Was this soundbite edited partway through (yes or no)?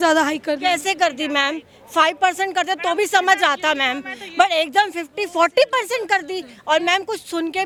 no